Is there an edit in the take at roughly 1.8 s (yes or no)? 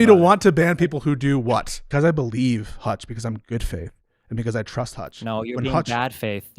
yes